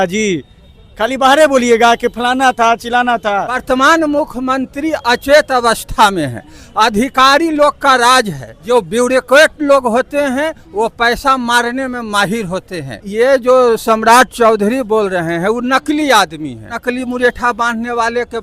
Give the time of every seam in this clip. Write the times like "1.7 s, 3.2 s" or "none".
3.6 s, 8.5 s, 13.1 s, 16.8 s